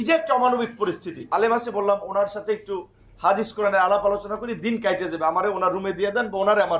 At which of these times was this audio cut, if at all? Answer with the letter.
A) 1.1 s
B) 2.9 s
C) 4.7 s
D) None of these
A